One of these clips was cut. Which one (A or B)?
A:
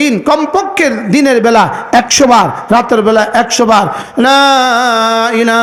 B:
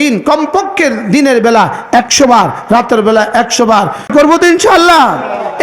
B